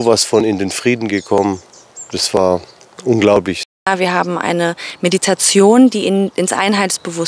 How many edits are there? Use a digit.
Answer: 1